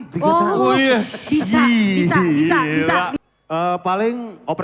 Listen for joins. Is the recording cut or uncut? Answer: cut